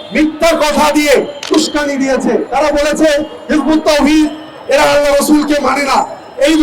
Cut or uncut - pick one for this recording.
cut